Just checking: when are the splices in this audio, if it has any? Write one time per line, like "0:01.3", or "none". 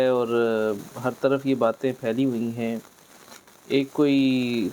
none